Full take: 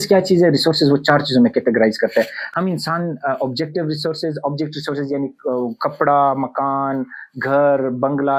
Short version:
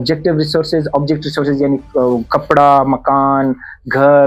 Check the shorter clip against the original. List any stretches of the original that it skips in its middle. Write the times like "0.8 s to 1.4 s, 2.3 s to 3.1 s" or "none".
none